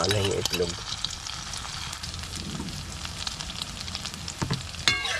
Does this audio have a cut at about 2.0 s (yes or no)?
yes